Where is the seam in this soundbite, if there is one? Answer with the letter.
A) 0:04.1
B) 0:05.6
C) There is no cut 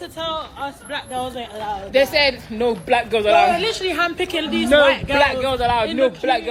A